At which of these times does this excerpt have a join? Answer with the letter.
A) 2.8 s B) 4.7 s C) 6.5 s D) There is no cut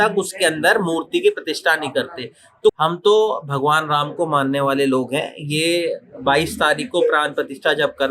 A